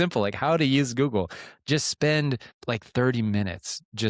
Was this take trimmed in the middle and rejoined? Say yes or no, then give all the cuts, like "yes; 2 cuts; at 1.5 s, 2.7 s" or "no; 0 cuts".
yes; 1 cut; at 2.5 s